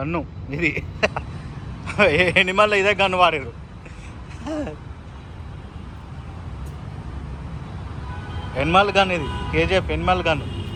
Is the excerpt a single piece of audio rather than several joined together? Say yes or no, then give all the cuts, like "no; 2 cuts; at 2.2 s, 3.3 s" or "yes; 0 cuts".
yes; 0 cuts